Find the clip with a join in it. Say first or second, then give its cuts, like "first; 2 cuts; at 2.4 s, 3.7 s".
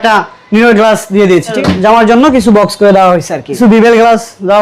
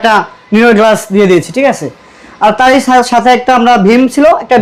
first; 2 cuts; at 1.6 s, 3.6 s